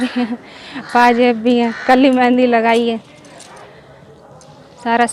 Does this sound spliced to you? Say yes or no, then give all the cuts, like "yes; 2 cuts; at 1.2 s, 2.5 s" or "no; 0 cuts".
no; 0 cuts